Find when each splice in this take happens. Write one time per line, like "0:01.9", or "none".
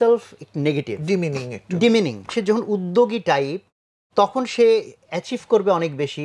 0:02.3

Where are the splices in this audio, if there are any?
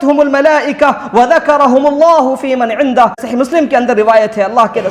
0:03.2

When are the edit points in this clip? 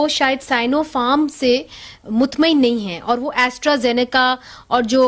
none

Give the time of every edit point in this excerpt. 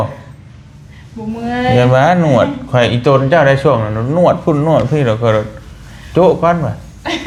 none

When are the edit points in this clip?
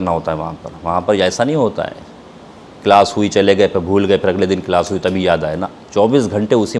none

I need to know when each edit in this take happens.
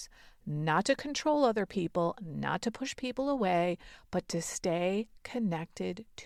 none

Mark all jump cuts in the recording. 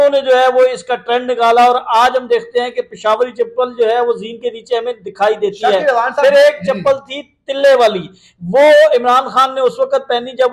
none

